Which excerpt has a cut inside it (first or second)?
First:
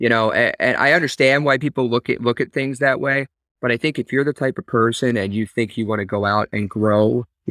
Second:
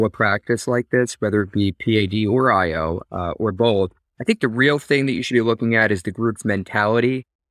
second